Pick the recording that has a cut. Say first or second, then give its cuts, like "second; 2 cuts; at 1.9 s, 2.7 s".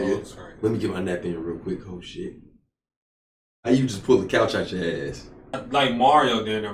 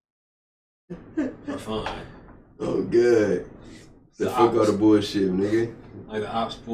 first; 1 cut; at 5.6 s